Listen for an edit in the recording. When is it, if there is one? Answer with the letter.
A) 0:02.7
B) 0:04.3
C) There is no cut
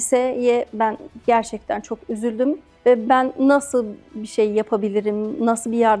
A